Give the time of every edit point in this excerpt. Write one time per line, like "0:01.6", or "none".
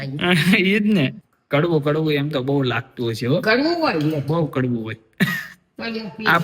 0:01.3